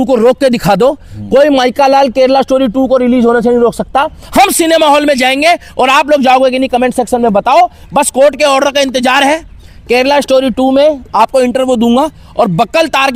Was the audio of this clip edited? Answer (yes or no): no